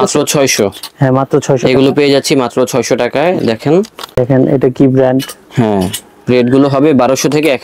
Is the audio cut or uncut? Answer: cut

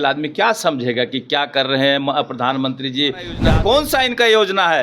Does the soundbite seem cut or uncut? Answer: cut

